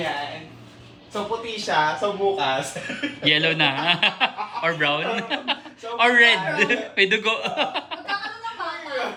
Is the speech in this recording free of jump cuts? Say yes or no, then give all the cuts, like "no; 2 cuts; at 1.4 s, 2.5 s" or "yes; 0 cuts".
yes; 0 cuts